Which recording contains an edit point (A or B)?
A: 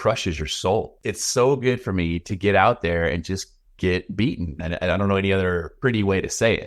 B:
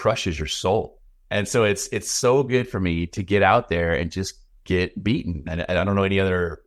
A